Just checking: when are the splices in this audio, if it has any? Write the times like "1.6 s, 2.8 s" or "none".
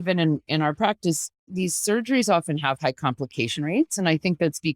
1.5 s